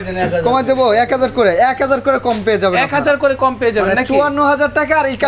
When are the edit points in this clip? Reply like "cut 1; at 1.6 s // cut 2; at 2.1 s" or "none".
none